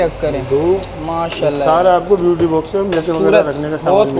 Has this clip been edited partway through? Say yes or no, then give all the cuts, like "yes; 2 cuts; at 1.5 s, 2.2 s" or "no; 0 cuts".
no; 0 cuts